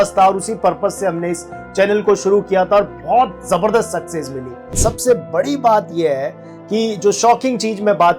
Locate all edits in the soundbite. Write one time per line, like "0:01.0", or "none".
0:04.8